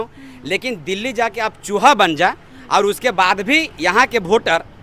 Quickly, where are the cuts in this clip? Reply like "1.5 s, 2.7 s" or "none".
none